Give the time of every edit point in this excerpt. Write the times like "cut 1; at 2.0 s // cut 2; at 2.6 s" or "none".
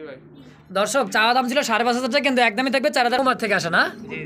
cut 1; at 3.2 s